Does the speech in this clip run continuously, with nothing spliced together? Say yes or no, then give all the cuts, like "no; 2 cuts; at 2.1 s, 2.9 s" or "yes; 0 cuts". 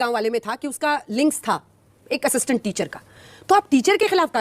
yes; 0 cuts